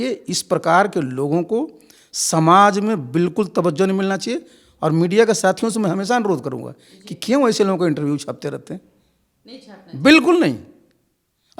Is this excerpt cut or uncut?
uncut